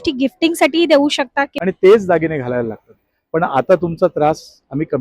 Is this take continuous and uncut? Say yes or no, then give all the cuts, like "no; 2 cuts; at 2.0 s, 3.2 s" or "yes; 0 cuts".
no; 1 cut; at 1.5 s